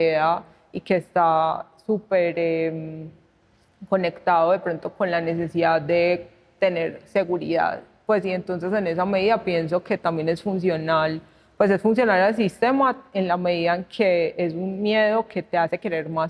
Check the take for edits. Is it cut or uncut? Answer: uncut